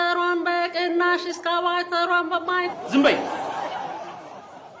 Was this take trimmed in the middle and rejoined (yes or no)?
no